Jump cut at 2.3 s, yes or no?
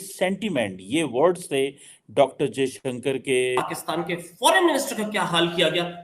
no